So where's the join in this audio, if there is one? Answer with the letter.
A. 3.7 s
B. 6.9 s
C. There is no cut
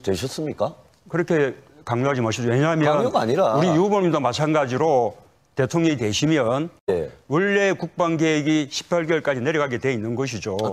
C